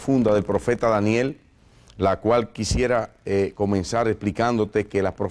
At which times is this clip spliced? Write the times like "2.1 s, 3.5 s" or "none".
none